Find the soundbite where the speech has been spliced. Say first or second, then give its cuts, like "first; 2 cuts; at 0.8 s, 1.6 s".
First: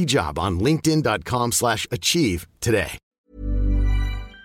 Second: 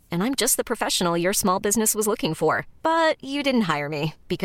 first; 1 cut; at 3.0 s